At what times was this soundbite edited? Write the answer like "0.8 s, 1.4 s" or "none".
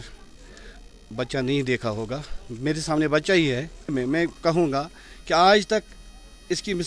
3.9 s